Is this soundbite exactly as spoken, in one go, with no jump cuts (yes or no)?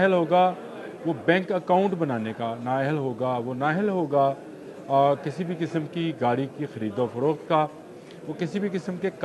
yes